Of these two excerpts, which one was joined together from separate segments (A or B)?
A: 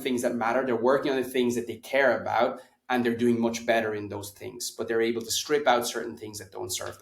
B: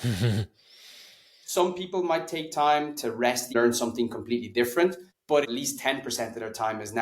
B